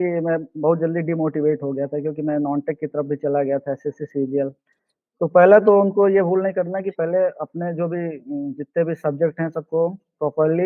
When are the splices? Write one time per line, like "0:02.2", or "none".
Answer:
none